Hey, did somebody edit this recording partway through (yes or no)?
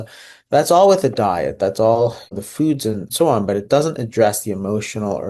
yes